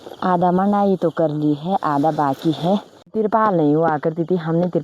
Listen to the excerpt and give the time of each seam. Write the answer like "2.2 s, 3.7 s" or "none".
3.1 s